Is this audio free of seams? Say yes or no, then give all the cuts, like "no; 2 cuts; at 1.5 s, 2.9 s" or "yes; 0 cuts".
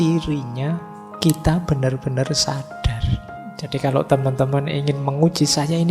no; 1 cut; at 3.4 s